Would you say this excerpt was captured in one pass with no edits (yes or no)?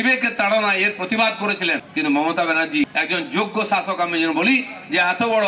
no